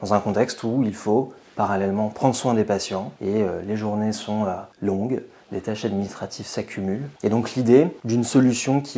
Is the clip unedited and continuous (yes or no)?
no